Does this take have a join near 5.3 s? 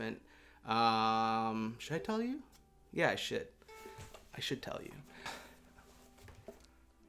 yes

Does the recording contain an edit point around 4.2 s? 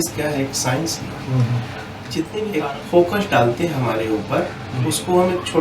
no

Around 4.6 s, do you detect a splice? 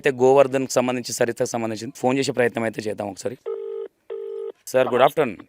yes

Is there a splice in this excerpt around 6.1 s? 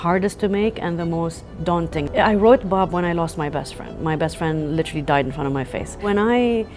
yes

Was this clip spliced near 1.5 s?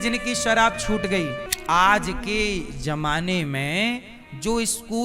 yes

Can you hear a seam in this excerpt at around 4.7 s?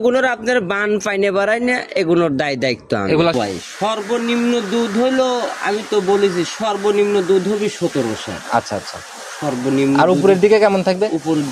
no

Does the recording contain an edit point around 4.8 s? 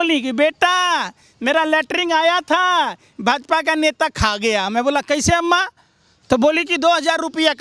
no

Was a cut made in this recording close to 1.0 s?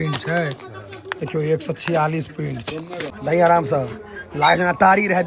no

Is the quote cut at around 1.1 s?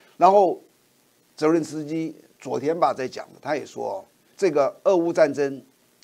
no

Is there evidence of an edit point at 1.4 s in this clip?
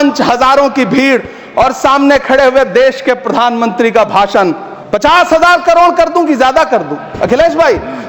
no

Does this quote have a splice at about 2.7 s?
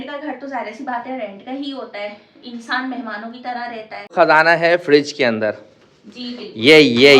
no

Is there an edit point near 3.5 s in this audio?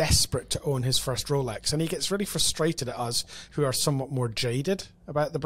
no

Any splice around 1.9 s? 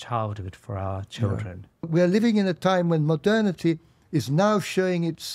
yes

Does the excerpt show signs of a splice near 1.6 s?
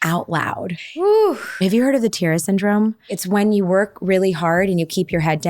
yes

